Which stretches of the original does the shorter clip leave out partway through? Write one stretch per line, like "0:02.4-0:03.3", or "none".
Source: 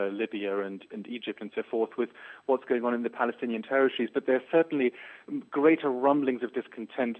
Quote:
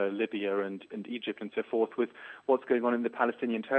none